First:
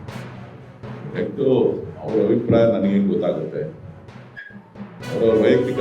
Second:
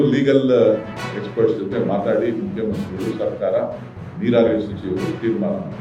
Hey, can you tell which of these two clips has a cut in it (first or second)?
first